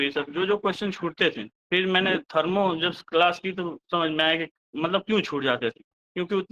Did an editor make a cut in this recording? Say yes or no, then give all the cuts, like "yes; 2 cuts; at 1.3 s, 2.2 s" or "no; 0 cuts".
yes; 1 cut; at 1.6 s